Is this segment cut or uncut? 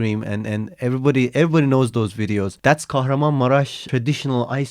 cut